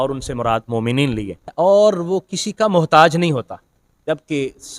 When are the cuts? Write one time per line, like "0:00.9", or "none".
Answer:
0:01.5

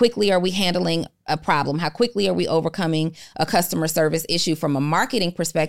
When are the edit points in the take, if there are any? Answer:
none

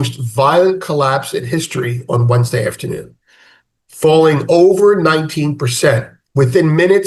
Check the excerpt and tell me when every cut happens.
none

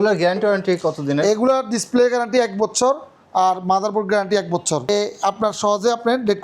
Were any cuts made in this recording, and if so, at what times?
0:04.9

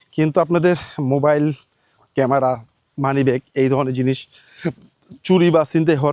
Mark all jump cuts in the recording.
none

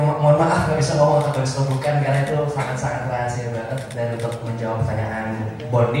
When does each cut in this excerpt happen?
none

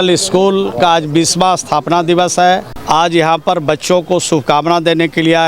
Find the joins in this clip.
0:02.7

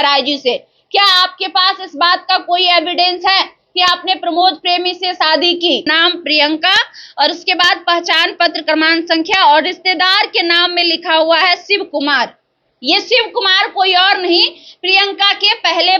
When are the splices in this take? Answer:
0:05.9

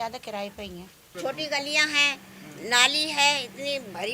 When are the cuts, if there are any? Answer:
0:01.1

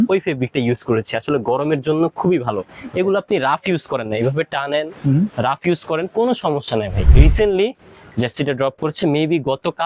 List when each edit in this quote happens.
0:07.0

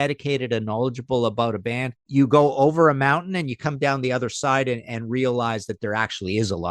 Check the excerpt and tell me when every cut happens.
0:02.1

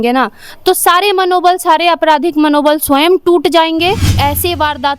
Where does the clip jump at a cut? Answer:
0:04.1

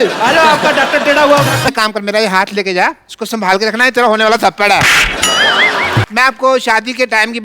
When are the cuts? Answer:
0:01.7
0:06.1

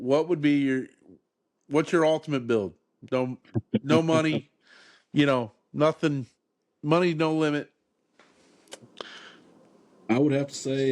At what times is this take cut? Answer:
none

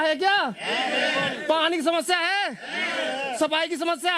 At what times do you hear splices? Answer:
none

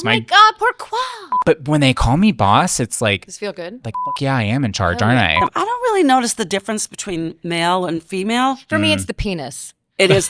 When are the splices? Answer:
0:01.2
0:05.4

